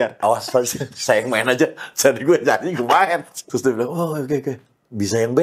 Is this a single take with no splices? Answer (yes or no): no